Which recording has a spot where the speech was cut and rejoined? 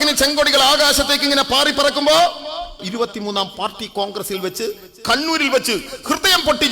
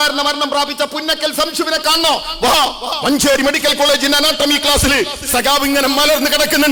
first; 1 cut; at 2.8 s

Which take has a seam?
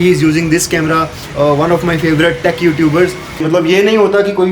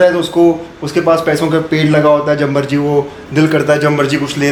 first; 2 cuts; at 1.2 s, 3.4 s

